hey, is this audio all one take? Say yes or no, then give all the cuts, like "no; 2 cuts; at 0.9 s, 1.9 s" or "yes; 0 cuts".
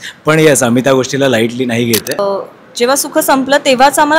no; 1 cut; at 2.2 s